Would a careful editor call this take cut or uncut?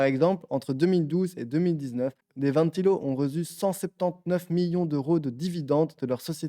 cut